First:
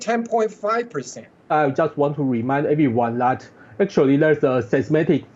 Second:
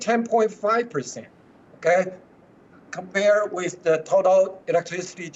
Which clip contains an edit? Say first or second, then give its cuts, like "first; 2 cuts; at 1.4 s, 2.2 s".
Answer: first; 1 cut; at 1.5 s